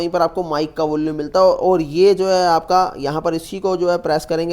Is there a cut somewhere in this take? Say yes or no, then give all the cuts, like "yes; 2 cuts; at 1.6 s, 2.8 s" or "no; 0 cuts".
no; 0 cuts